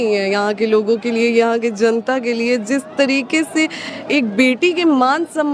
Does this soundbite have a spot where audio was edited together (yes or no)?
no